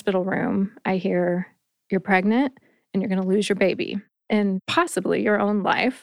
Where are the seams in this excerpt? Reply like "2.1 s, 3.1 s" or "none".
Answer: 4.5 s